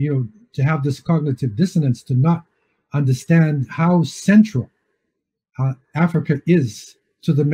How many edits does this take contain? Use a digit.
0